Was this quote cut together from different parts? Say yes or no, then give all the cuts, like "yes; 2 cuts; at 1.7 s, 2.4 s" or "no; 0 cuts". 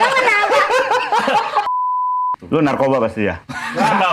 yes; 1 cut; at 1.9 s